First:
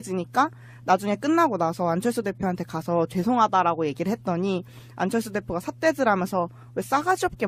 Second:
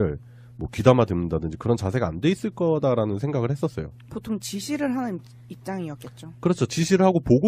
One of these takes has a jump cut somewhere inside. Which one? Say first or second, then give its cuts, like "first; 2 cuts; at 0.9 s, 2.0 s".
second; 1 cut; at 1.3 s